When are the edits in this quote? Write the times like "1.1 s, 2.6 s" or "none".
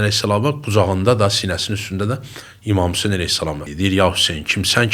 3.6 s